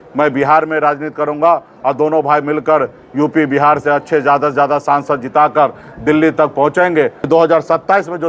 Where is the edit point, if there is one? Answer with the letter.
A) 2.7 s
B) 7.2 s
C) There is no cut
B